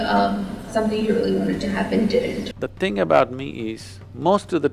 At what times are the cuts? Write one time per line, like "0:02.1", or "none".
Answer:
0:02.5